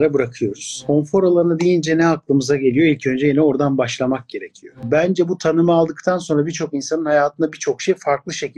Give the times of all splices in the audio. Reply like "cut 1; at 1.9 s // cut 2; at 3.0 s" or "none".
cut 1; at 0.8 s // cut 2; at 4.8 s